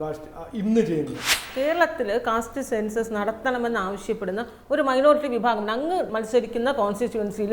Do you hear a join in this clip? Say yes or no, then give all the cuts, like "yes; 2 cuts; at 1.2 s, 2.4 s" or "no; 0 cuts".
yes; 2 cuts; at 1.5 s, 6.1 s